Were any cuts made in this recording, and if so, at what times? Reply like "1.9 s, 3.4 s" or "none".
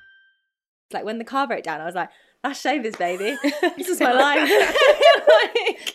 0.9 s